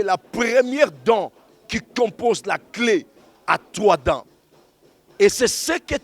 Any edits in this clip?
no; 0 cuts

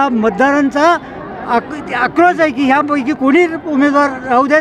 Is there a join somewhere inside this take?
no; 0 cuts

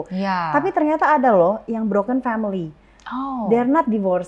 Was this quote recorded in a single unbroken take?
yes; 0 cuts

